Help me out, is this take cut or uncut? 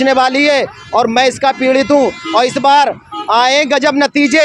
uncut